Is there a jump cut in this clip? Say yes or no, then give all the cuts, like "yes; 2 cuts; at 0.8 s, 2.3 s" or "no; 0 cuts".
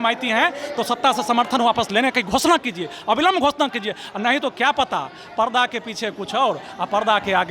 no; 0 cuts